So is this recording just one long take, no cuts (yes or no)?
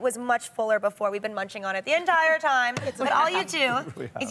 no